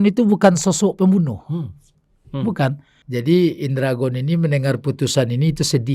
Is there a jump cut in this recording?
yes; 1 cut; at 2.9 s

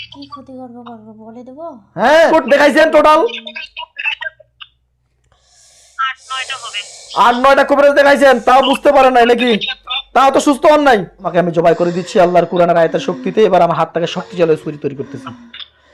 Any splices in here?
yes; 2 cuts; at 2.3 s, 11.3 s

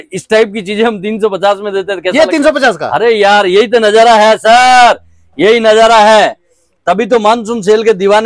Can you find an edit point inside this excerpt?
no; 0 cuts

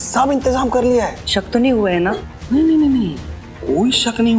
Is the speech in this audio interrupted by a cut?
yes; 1 cut; at 1.2 s

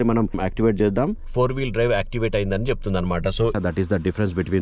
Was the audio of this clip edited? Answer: yes; 2 cuts; at 1.3 s, 3.5 s

